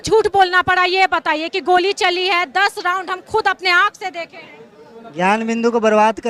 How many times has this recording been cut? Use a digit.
0